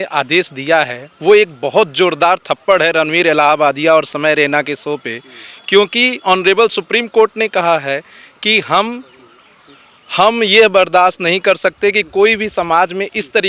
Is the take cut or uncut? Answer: uncut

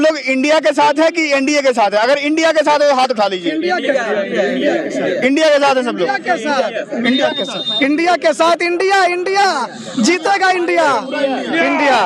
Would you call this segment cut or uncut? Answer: uncut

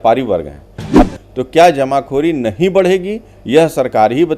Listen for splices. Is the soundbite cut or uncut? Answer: cut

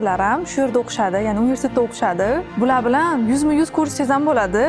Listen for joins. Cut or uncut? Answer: uncut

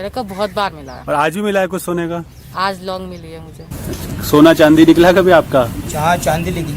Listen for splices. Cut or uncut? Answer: cut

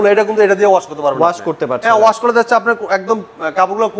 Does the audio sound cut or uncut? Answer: uncut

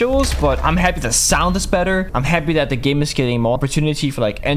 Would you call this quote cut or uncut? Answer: cut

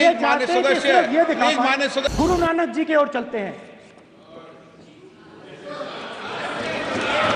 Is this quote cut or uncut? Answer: cut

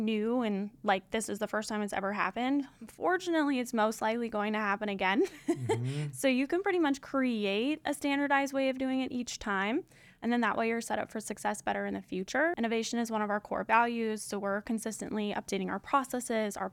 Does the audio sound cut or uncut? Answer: cut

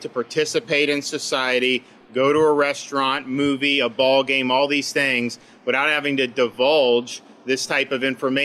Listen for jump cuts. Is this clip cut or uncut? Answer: uncut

